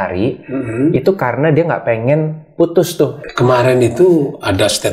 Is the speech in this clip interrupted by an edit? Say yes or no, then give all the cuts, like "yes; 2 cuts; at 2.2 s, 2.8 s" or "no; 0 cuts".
yes; 1 cut; at 3.2 s